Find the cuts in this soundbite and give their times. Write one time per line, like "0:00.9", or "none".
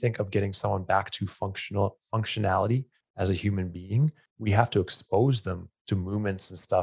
0:03.0
0:04.3
0:05.7

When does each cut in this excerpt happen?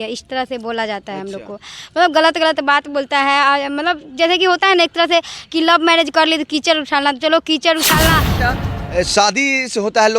0:08.3

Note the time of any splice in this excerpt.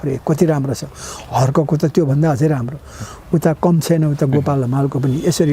none

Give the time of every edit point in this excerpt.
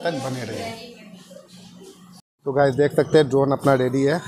0:02.3

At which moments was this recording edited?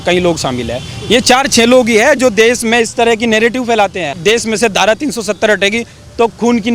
0:04.1

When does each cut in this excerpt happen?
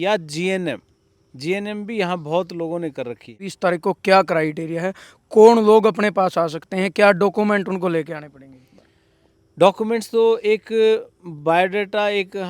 0:03.5

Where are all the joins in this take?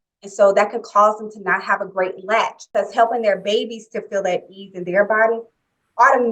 0:02.6

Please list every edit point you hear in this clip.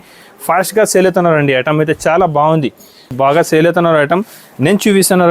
0:03.1

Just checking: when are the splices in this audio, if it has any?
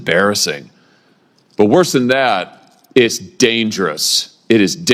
none

